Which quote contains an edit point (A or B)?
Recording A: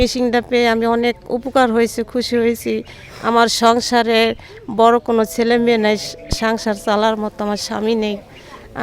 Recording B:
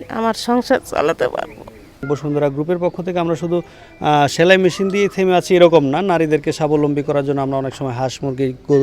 B